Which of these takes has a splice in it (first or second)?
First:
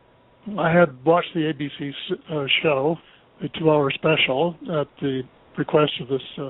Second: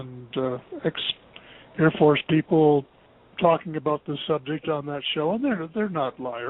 first